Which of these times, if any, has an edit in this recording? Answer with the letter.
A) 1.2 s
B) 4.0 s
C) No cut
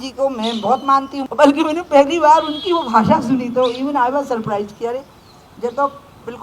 A